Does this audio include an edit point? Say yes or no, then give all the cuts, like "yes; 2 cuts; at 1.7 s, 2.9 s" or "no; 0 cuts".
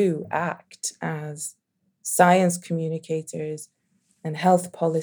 no; 0 cuts